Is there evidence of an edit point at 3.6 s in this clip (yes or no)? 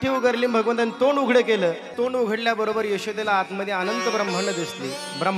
no